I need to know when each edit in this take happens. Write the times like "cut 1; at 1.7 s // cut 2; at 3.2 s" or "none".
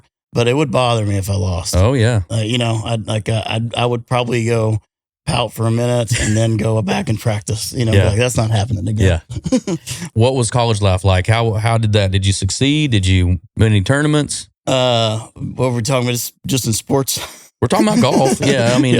cut 1; at 10.1 s